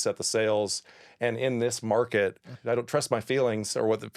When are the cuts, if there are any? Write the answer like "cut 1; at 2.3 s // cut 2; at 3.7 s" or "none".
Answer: cut 1; at 2.5 s